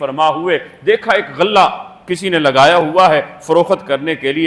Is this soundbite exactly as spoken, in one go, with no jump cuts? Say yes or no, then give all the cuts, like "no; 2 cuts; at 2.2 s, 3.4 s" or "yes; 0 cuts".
yes; 0 cuts